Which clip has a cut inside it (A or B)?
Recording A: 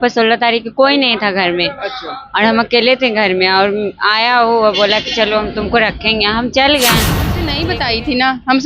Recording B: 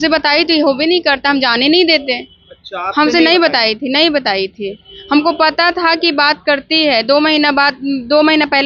A